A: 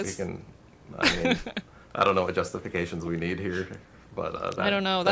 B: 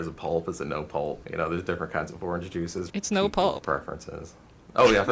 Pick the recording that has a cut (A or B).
B